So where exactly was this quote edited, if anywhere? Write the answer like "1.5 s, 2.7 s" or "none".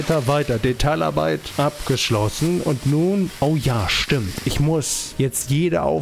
1.5 s, 3.3 s, 5.0 s